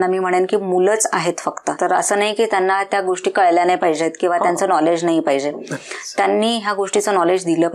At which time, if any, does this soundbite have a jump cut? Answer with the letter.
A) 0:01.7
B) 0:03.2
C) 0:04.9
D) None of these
A